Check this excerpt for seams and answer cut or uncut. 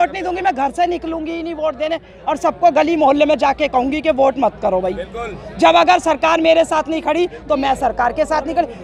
uncut